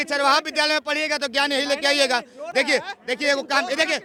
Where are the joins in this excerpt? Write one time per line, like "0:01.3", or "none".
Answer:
none